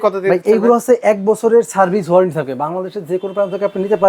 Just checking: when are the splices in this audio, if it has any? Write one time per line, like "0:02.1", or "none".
none